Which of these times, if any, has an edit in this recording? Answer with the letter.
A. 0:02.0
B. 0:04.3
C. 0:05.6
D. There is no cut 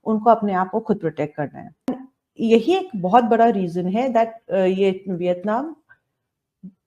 C